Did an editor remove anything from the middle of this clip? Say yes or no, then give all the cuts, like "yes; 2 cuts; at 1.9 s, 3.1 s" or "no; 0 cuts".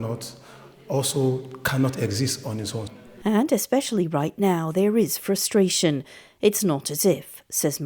no; 0 cuts